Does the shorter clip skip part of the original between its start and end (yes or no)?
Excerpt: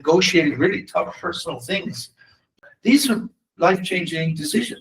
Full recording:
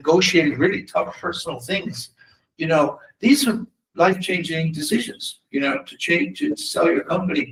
yes